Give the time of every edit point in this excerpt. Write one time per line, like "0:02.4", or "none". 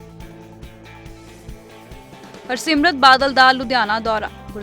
0:02.2